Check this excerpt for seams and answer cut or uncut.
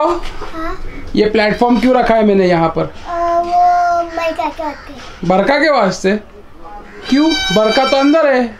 uncut